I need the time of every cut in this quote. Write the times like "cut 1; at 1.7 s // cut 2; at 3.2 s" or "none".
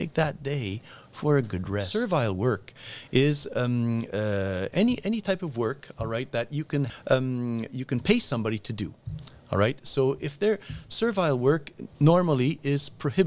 cut 1; at 1.9 s // cut 2; at 6.9 s